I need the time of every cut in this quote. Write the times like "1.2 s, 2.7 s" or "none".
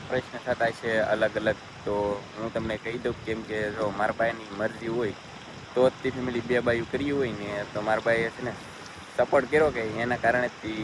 none

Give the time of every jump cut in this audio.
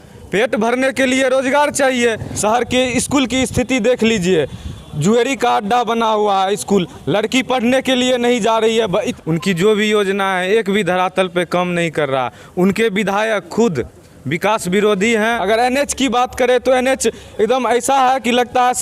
2.3 s, 9.1 s, 15.2 s

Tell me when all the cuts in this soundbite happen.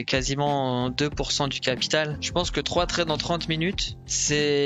2.2 s

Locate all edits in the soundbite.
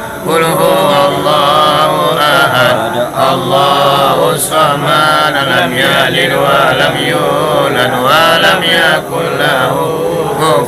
none

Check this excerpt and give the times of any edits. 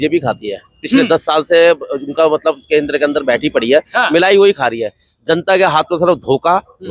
none

